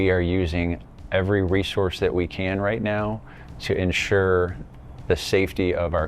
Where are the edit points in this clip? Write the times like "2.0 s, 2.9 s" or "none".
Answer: none